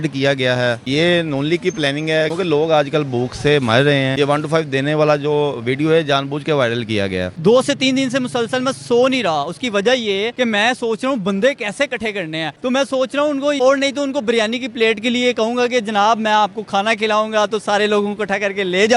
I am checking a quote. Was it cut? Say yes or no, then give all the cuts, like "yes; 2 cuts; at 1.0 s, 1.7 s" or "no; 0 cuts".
yes; 6 cuts; at 2.3 s, 4.1 s, 7.3 s, 10.3 s, 12.5 s, 13.6 s